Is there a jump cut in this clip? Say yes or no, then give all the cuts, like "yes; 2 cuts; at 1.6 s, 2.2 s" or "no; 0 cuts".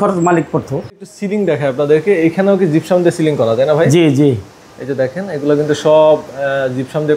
yes; 1 cut; at 1.2 s